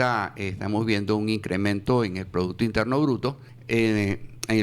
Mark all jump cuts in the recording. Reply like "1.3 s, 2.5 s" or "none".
3.5 s

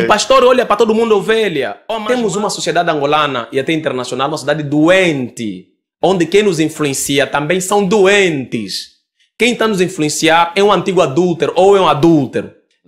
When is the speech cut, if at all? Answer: 1.8 s

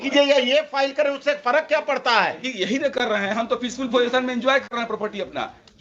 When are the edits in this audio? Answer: none

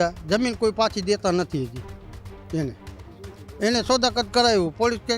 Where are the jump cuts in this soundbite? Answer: none

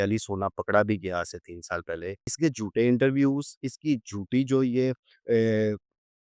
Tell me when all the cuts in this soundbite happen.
2.3 s

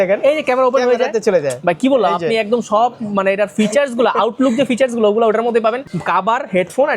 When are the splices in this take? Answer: 5.9 s

